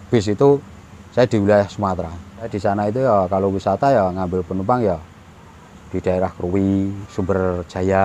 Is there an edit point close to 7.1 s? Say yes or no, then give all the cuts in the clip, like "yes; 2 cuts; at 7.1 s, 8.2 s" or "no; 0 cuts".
yes; 2 cuts; at 2.5 s, 7.1 s